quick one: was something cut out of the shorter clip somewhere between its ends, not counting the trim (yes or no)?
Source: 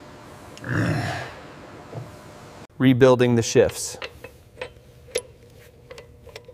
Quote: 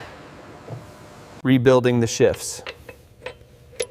yes